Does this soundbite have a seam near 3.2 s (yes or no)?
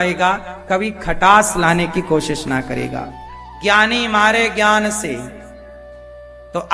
yes